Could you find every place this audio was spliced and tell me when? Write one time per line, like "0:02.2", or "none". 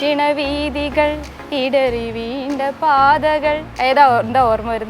none